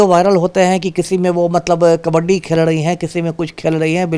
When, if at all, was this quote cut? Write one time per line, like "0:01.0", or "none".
none